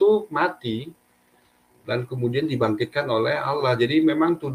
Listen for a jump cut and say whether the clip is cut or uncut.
uncut